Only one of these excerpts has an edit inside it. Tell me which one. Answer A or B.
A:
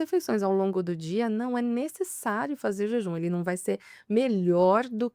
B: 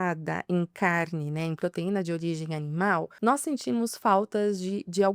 B